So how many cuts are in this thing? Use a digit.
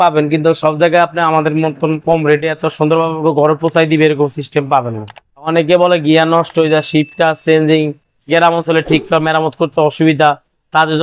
1